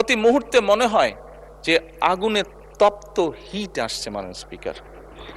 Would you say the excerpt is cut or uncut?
uncut